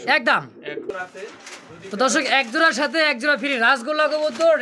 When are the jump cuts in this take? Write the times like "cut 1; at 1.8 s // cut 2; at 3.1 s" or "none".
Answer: cut 1; at 0.9 s